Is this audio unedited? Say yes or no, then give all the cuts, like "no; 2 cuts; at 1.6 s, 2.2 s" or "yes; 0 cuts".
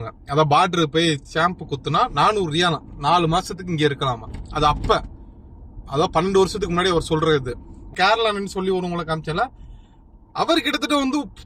no; 1 cut; at 7.9 s